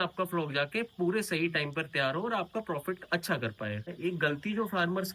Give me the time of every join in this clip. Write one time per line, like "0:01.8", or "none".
0:03.9